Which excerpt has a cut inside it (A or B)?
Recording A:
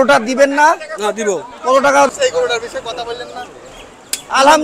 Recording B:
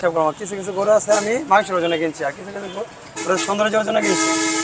A